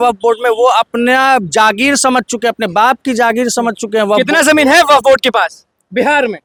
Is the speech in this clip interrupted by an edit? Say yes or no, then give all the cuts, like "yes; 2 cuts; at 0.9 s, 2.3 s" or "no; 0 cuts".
no; 0 cuts